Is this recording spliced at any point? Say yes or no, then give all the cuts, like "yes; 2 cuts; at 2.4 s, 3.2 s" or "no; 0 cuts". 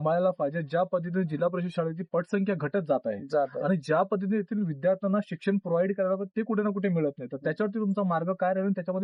no; 0 cuts